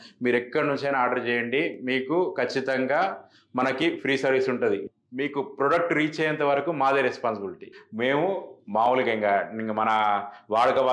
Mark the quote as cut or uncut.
cut